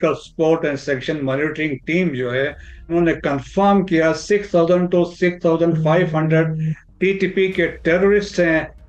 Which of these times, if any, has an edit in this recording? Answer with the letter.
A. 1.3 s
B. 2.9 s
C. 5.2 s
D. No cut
B